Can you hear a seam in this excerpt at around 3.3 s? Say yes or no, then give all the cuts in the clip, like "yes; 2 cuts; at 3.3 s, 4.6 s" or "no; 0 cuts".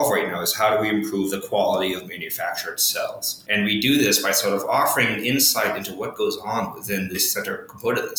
yes; 2 cuts; at 3.3 s, 7.2 s